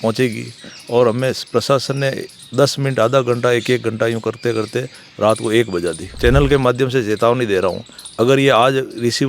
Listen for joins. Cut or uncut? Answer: cut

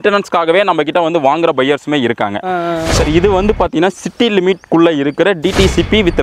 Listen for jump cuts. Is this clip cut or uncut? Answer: cut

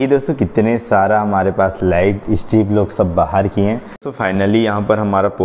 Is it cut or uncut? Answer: cut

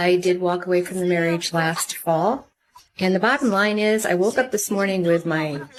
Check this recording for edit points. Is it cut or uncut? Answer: uncut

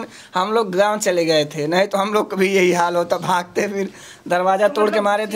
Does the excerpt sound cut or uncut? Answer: uncut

